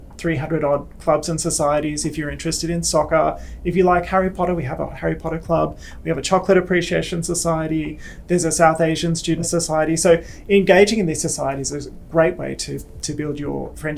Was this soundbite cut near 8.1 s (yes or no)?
no